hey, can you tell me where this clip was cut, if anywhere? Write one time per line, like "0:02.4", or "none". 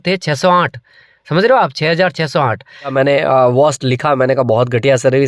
0:02.9